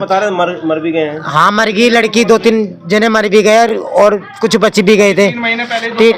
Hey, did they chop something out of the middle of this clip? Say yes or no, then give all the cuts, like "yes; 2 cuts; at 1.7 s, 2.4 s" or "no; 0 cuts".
no; 0 cuts